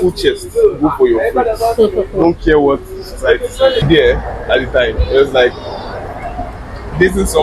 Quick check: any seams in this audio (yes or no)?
yes